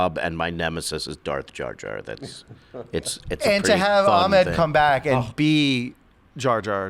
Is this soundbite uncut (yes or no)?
yes